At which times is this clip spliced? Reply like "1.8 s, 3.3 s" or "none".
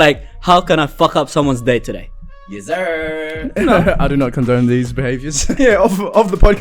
5.5 s